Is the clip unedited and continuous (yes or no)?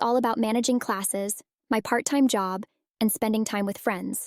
no